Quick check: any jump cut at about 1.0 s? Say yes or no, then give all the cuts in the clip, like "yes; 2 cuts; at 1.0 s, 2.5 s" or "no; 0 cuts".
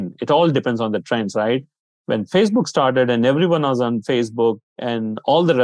no; 1 cut; at 4.7 s